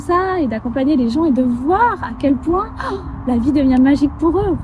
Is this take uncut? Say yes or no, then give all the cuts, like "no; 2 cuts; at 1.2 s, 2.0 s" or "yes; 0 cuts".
yes; 0 cuts